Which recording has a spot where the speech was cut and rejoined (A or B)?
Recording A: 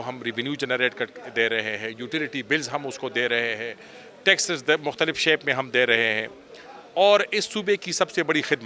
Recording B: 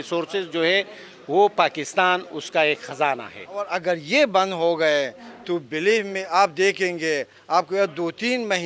B